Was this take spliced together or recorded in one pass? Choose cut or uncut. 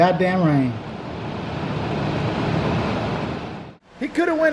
cut